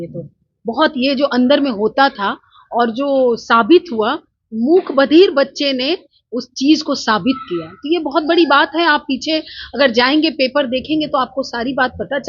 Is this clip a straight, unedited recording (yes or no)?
yes